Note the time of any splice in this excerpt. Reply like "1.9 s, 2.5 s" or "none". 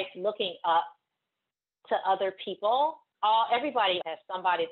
3.1 s